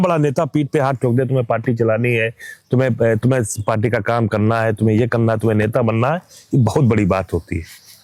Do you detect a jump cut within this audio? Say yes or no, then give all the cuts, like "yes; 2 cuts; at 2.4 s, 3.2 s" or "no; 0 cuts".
no; 0 cuts